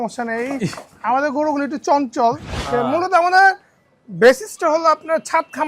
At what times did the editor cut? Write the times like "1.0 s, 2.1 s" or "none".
2.5 s